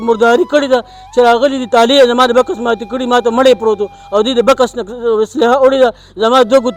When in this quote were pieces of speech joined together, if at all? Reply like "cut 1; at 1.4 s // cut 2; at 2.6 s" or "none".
none